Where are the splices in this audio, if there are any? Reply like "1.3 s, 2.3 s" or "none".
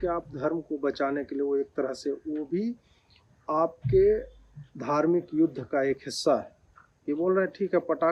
none